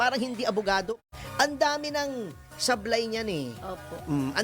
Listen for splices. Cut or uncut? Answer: cut